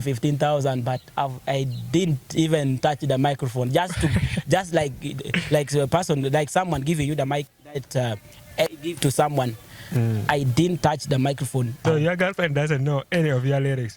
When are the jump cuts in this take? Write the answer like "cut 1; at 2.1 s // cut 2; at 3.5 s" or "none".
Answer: cut 1; at 11.8 s